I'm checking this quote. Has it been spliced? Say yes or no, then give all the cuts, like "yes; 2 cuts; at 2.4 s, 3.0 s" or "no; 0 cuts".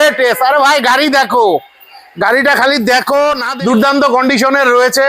yes; 1 cut; at 3.5 s